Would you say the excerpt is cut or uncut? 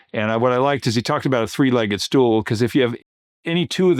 uncut